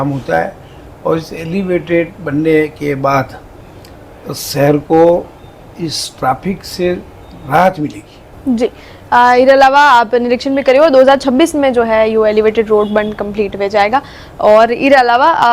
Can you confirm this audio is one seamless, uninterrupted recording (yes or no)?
yes